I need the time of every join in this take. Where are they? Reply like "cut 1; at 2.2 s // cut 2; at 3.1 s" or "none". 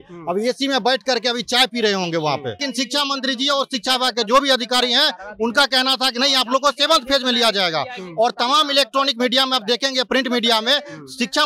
cut 1; at 2.6 s